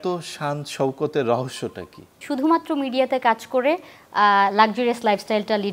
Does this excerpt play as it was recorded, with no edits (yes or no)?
no